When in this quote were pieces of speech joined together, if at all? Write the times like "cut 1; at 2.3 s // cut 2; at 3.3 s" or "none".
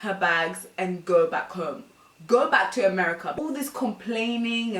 cut 1; at 3.4 s